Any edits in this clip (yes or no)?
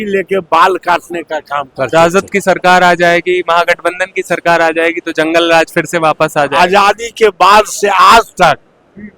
yes